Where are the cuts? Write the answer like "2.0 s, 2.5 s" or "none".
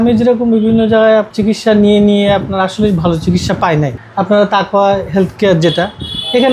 1.3 s, 4.0 s